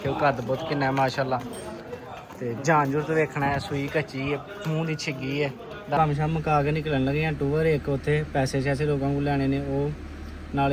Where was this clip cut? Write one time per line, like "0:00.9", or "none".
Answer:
0:06.0